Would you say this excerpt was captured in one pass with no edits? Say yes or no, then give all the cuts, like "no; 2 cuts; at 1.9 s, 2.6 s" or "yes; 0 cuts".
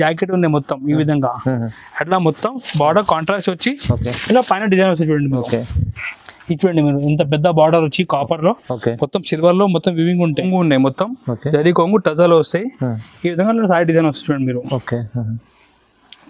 no; 1 cut; at 10.4 s